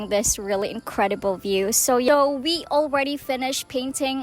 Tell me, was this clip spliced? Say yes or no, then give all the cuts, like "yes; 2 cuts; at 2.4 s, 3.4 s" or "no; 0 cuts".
yes; 1 cut; at 2.1 s